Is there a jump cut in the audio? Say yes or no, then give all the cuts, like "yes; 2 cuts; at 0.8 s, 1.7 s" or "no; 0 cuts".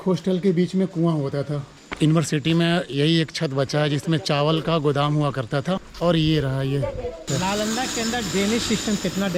yes; 3 cuts; at 1.8 s, 5.9 s, 7.3 s